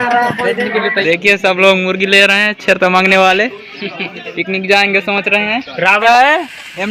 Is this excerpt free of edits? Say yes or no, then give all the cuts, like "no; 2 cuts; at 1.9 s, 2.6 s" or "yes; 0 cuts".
no; 2 cuts; at 1.0 s, 6.0 s